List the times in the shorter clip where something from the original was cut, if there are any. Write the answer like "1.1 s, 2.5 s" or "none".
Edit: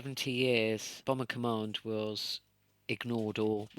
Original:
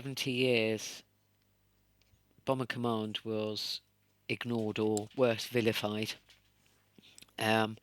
0.9 s